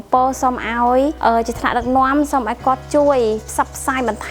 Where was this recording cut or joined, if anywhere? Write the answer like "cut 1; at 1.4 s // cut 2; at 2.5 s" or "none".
cut 1; at 1.2 s